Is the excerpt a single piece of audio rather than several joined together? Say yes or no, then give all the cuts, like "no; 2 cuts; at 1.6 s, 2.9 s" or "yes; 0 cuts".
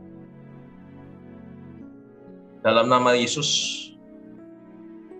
yes; 0 cuts